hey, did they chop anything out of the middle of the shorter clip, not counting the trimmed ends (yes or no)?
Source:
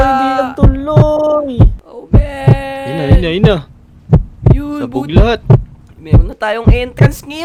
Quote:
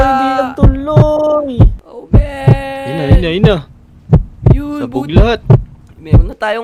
no